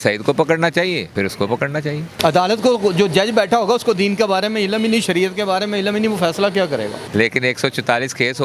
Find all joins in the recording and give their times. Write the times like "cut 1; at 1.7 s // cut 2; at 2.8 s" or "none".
cut 1; at 1.1 s // cut 2; at 2.2 s // cut 3; at 7.0 s